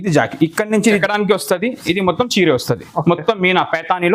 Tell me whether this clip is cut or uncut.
cut